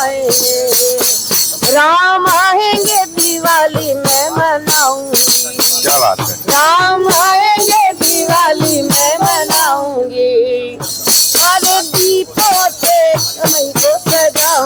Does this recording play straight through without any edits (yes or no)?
yes